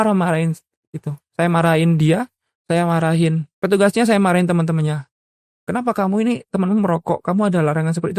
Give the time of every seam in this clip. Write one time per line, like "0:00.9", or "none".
0:03.5